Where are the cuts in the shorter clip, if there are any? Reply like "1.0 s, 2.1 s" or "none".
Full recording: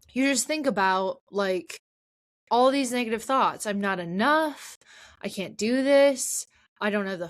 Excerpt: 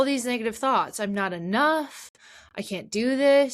none